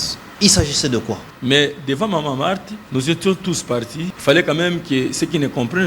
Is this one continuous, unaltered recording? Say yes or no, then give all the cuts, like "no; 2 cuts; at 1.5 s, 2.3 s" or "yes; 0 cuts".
no; 3 cuts; at 1.3 s, 2.7 s, 4.1 s